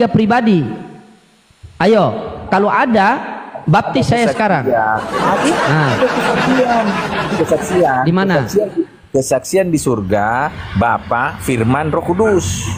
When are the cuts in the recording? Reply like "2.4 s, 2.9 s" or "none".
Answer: none